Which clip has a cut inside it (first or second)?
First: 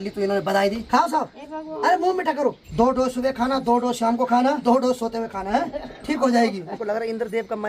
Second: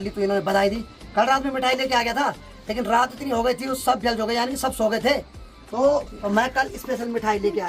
first